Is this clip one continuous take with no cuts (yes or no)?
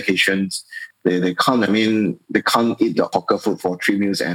no